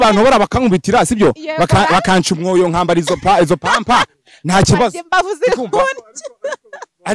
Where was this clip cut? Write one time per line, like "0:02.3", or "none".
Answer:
none